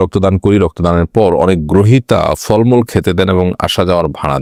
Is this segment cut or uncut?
uncut